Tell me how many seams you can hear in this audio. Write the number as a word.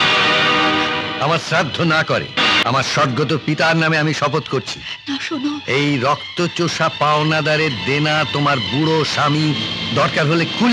one